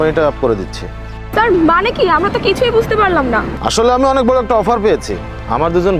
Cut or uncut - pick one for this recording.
uncut